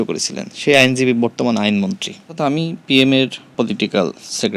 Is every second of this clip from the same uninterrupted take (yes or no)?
no